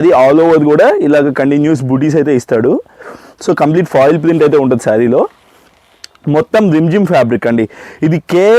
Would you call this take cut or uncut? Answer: uncut